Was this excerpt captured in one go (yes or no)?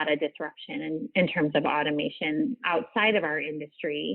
no